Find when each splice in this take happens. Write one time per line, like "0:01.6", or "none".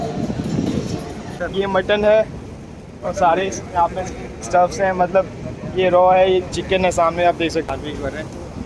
0:01.3
0:07.7